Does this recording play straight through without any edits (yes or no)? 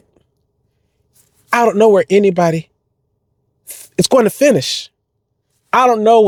yes